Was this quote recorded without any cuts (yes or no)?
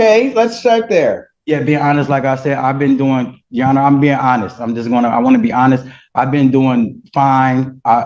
yes